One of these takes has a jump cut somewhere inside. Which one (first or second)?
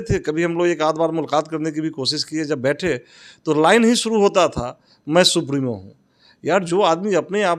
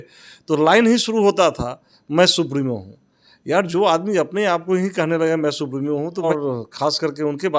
second